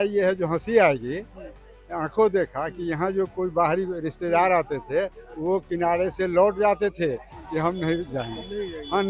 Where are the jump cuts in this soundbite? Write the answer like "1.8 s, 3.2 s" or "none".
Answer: none